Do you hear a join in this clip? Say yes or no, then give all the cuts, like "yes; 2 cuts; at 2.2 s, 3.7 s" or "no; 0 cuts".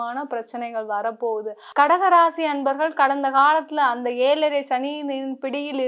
yes; 1 cut; at 1.6 s